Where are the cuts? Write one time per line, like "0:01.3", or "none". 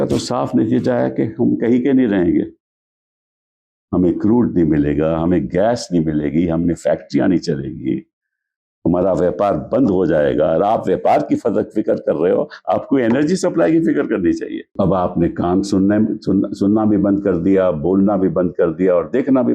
0:14.7